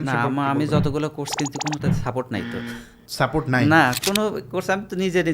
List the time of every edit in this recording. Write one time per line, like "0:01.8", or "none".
0:04.0